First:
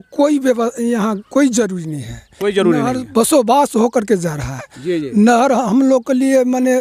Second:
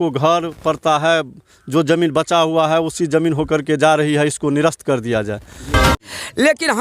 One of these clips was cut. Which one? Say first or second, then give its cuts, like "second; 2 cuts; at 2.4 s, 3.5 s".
second; 1 cut; at 5.9 s